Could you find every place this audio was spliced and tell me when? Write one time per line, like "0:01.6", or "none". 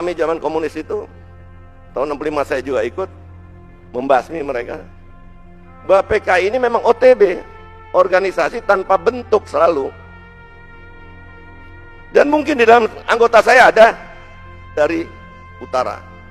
0:14.7